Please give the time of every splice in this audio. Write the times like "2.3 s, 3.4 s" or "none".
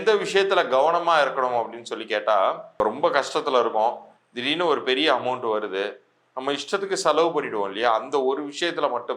2.8 s

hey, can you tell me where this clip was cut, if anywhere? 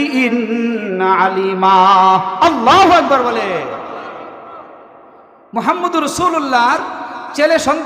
none

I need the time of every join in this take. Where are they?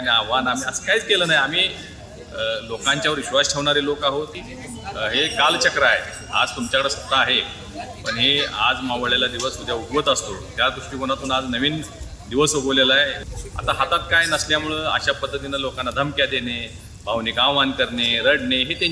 4.5 s, 13.2 s

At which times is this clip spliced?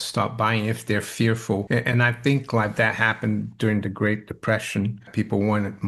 1.6 s, 5.1 s

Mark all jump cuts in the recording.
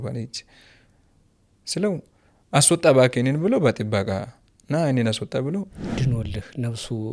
5.8 s

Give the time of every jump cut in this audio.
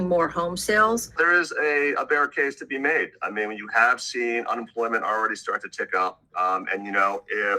1.1 s

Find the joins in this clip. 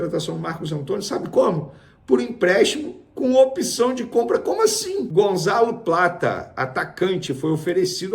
5.1 s

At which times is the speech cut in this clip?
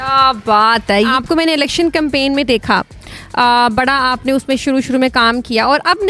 1.1 s

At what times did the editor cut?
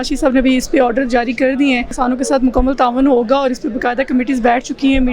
1.9 s

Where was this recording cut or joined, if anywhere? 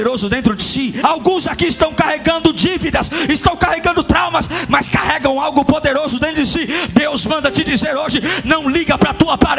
1.0 s

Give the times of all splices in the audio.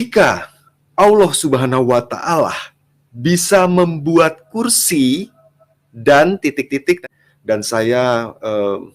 7.1 s

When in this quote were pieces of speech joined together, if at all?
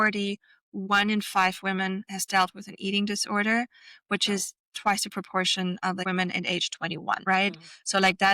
6.0 s, 7.2 s

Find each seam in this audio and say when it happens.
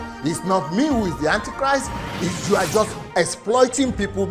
2.0 s

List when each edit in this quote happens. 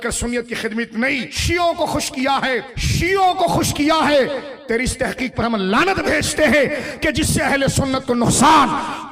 1.3 s, 2.8 s

